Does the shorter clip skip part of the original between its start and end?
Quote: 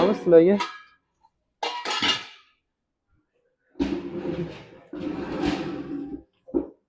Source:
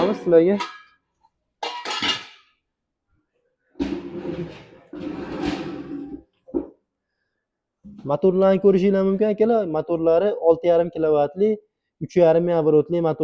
no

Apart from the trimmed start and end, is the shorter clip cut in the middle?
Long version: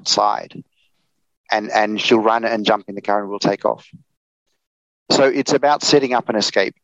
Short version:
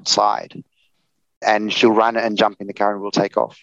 yes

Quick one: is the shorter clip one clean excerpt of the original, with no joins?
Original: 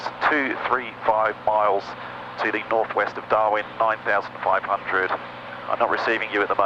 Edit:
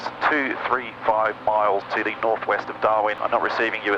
no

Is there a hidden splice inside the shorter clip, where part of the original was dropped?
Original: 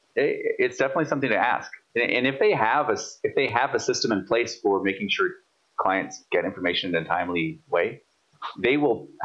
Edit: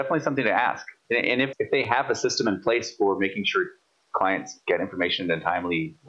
yes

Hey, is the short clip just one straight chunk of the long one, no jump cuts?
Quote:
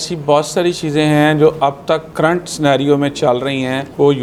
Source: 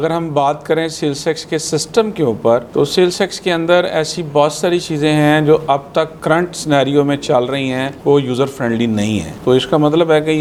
yes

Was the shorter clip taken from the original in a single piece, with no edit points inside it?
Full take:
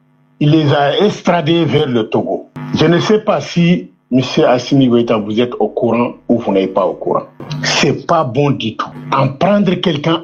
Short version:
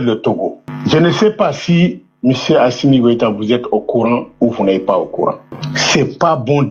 yes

